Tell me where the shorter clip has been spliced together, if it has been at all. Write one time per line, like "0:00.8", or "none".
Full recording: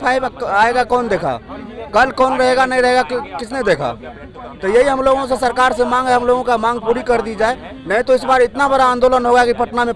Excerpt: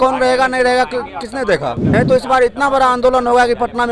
0:01.8